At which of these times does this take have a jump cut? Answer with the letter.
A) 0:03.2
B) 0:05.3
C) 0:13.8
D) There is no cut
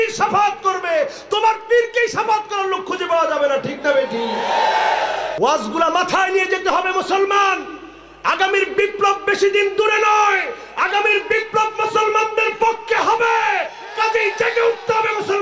B